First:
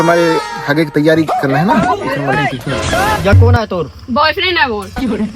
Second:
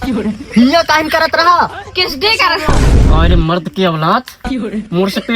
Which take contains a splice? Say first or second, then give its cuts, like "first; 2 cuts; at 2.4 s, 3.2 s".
first; 1 cut; at 3.2 s